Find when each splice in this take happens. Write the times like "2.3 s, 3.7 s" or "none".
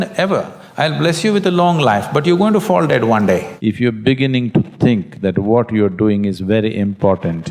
3.5 s